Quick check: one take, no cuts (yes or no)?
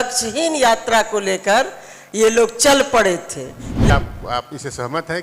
no